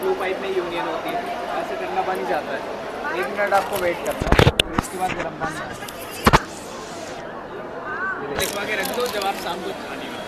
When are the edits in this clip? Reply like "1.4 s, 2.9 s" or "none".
none